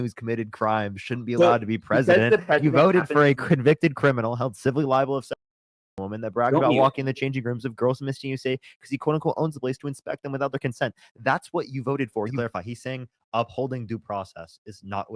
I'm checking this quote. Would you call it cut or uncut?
cut